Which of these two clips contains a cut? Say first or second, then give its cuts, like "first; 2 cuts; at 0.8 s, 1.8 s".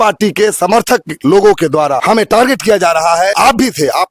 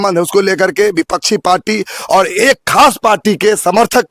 first; 2 cuts; at 2.0 s, 3.3 s